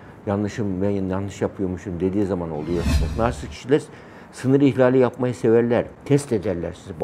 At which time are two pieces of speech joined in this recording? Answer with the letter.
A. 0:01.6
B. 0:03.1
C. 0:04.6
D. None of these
B